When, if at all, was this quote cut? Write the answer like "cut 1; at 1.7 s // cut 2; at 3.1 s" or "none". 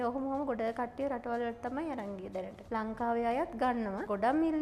none